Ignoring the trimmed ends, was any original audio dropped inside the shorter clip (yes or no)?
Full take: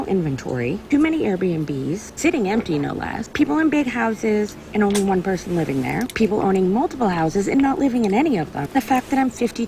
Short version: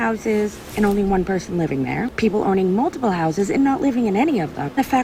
no